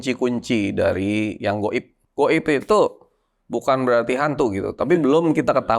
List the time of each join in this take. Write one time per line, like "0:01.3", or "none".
0:02.0